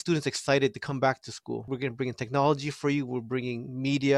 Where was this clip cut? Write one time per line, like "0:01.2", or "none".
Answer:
0:01.6